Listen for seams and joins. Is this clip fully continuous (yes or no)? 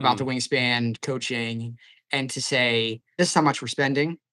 no